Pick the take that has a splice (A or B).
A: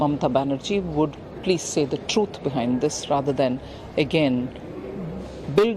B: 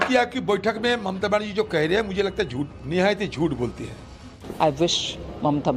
B